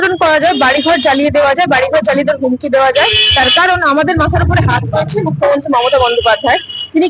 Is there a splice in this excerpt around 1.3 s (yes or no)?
no